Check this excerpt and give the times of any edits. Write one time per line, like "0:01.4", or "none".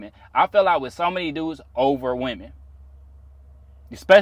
none